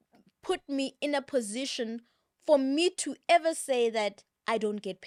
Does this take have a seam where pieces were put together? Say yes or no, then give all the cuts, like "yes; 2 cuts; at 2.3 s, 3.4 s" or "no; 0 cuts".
no; 0 cuts